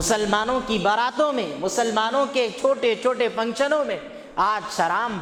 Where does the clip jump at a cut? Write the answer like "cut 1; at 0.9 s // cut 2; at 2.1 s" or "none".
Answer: none